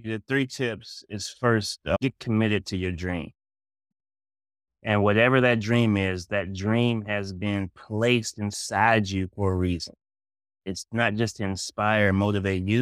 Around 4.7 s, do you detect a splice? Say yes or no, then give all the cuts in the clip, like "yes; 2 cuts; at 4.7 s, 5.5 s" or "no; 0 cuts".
no; 0 cuts